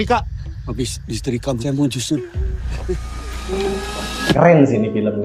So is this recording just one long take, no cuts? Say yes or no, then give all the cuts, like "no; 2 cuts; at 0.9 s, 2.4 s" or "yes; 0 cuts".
no; 1 cut; at 4.3 s